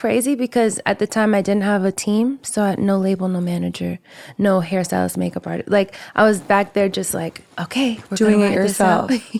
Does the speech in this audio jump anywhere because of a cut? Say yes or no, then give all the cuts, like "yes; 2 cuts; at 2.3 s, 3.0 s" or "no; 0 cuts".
no; 0 cuts